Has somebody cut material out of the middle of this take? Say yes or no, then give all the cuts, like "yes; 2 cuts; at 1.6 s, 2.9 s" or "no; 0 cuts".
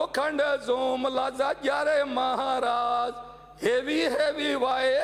no; 0 cuts